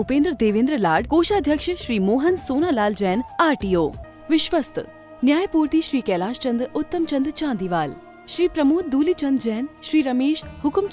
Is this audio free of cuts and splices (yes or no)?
no